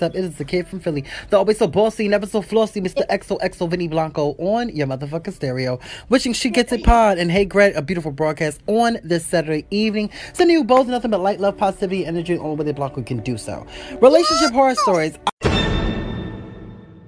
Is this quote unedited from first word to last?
no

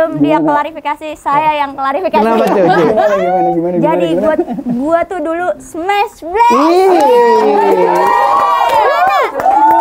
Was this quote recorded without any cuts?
yes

